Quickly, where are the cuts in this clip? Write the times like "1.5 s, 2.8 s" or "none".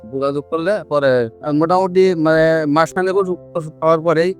1.4 s

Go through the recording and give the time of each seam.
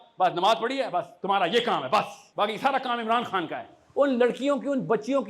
2.2 s, 3.8 s

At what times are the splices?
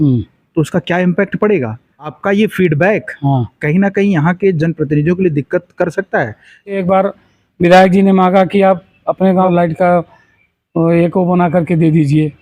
2.2 s, 6.8 s, 9.5 s

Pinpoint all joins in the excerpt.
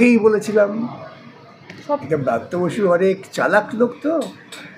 2.0 s

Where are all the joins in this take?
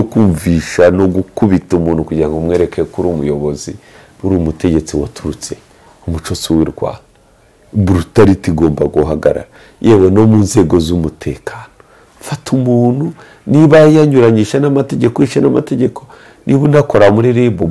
none

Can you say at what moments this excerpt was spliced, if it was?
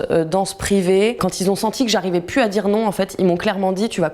1.3 s

